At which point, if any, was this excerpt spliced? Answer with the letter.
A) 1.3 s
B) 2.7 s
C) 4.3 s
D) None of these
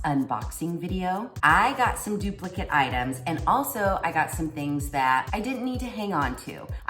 A